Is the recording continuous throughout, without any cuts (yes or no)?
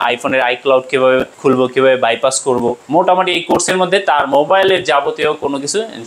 no